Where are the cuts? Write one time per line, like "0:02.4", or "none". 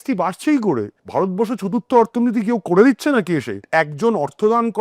0:01.0
0:03.6